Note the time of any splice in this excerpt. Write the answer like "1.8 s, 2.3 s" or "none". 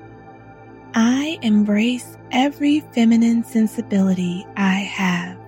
0.9 s